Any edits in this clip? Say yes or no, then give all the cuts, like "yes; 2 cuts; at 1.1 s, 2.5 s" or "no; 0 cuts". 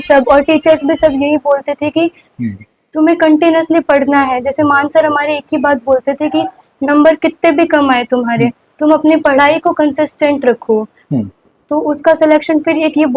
no; 0 cuts